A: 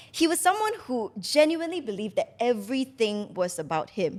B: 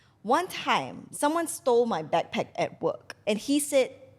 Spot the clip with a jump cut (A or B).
B